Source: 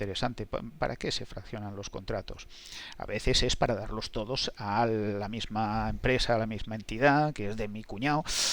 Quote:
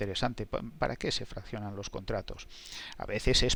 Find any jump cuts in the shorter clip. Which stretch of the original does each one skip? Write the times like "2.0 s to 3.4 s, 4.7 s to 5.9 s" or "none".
none